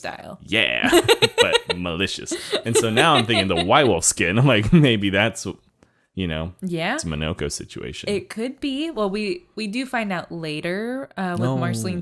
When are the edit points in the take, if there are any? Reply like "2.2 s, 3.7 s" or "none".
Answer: none